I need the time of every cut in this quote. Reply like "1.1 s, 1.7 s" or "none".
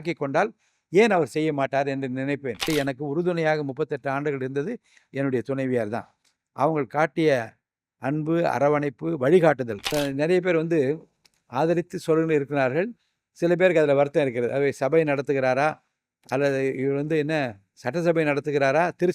2.6 s, 9.9 s